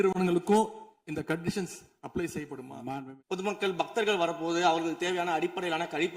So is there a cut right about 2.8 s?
yes; 1 cut; at 2.8 s

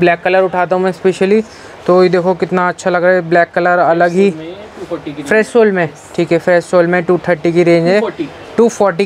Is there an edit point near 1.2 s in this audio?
no; 0 cuts

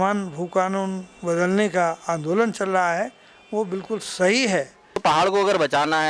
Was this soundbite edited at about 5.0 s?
yes; 1 cut; at 5.0 s

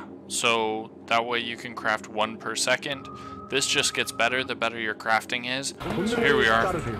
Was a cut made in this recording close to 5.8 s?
yes; 1 cut; at 5.8 s

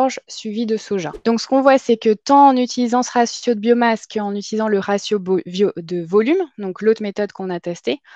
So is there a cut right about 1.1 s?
yes; 1 cut; at 1.1 s

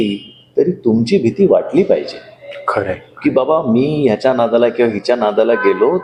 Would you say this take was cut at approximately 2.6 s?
no; 0 cuts

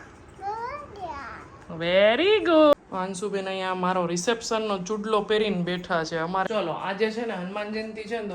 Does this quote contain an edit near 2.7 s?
yes; 2 cuts; at 2.7 s, 6.5 s

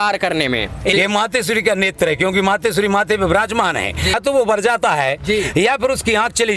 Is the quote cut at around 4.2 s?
yes; 2 cuts; at 0.9 s, 4.2 s

